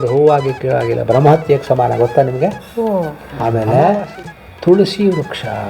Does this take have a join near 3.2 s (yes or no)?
yes